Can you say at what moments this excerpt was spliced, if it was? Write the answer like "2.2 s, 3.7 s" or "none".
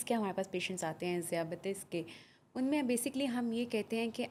none